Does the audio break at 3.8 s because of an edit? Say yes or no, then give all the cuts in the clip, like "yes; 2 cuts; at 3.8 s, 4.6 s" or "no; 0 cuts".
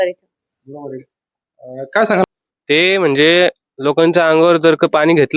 no; 1 cut; at 2.2 s